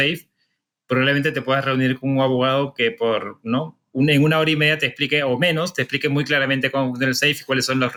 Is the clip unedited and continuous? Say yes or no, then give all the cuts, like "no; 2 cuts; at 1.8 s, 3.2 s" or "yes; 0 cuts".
yes; 0 cuts